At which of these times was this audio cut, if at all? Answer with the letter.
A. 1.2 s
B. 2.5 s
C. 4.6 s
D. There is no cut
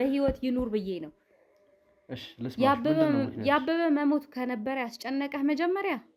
D